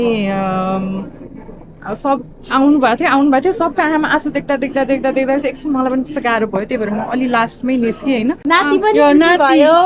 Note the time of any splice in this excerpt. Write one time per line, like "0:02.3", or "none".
0:08.4